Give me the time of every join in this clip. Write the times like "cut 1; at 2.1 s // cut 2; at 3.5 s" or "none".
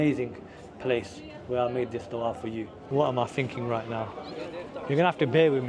cut 1; at 2.8 s